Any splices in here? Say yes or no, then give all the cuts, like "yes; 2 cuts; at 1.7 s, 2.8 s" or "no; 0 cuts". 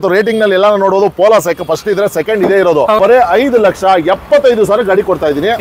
yes; 1 cut; at 3.0 s